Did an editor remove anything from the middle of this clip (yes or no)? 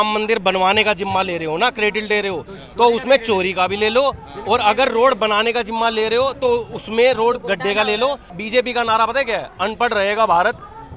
yes